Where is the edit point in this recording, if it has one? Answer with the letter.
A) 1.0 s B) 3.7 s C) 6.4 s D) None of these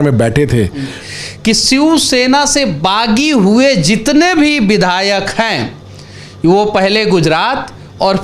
A